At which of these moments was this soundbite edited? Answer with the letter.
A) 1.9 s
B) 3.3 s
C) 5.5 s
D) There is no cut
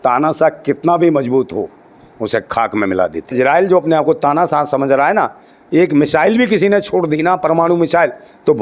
B